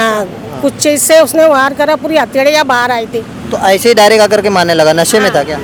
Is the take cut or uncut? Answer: uncut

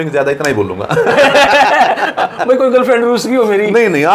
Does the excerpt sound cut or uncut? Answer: uncut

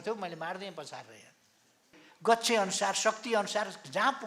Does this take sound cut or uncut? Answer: cut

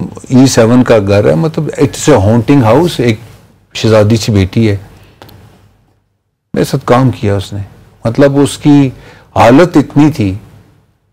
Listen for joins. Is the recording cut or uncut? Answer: uncut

